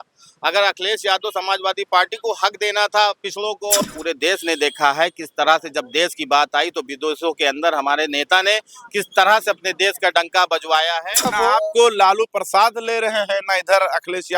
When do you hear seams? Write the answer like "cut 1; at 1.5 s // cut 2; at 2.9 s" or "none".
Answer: cut 1; at 3.9 s // cut 2; at 11.3 s

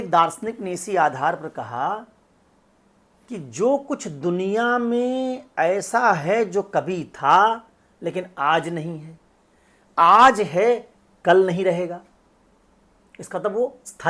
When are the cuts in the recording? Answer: none

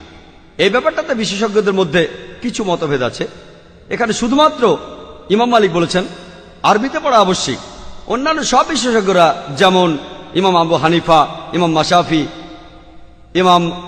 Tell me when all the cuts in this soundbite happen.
none

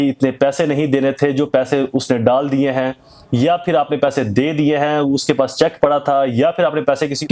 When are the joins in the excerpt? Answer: none

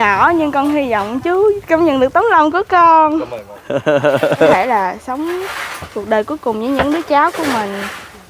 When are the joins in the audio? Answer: cut 1; at 4.5 s

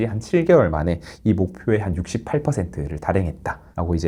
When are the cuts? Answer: none

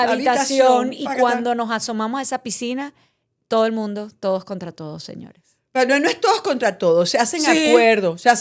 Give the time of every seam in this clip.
none

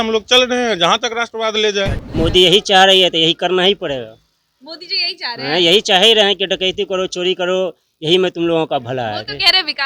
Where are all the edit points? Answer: cut 1; at 2.0 s

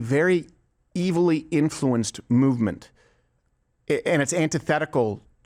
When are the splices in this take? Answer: none

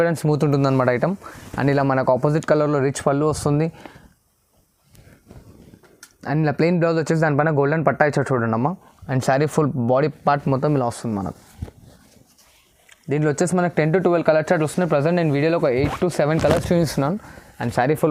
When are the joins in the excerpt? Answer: none

